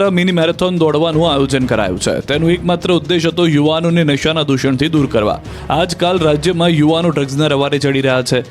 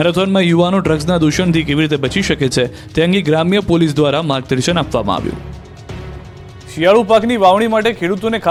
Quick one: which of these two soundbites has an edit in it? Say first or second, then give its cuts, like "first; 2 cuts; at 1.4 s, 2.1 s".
first; 1 cut; at 5.1 s